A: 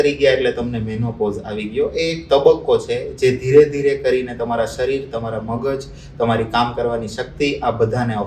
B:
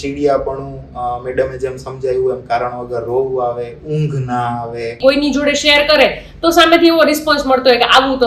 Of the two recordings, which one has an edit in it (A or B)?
B